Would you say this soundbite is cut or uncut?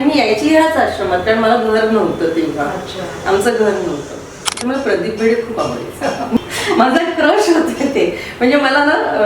cut